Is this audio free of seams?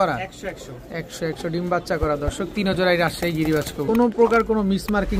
no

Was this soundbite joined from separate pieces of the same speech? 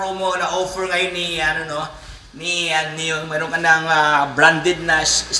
no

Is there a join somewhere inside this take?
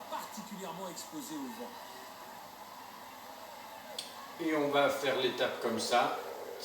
yes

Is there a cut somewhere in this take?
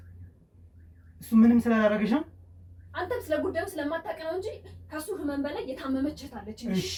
no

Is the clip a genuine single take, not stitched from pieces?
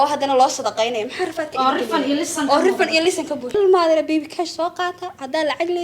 no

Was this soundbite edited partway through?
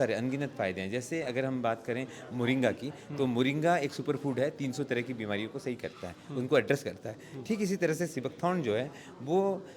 no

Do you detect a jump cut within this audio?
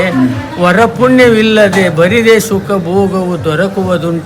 no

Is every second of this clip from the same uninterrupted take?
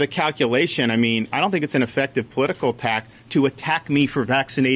yes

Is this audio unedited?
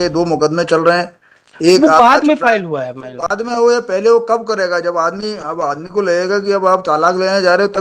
yes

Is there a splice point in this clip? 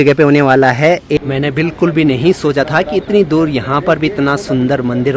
yes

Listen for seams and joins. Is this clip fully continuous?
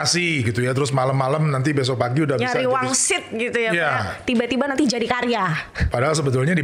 yes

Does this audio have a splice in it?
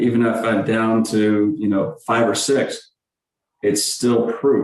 no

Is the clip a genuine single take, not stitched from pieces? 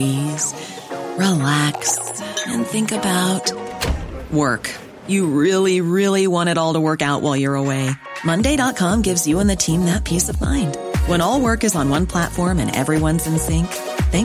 yes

